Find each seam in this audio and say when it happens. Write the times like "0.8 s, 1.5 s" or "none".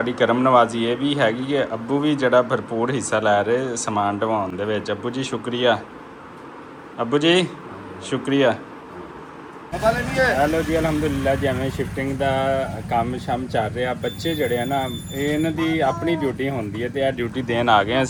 none